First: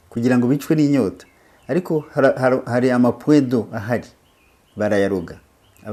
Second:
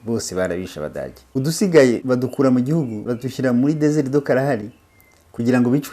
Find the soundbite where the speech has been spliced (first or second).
second